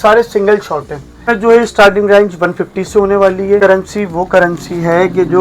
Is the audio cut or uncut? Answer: cut